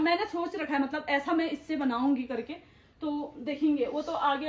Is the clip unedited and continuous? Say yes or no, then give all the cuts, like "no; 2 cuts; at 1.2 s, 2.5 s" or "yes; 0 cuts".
yes; 0 cuts